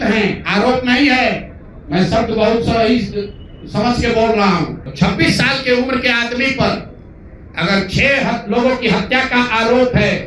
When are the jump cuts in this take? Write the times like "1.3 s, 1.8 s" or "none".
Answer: 4.8 s